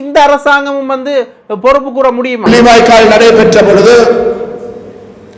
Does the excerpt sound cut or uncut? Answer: cut